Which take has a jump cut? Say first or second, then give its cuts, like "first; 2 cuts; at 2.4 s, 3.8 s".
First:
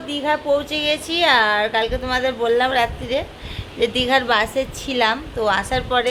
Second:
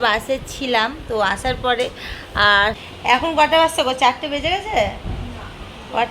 second; 1 cut; at 2.8 s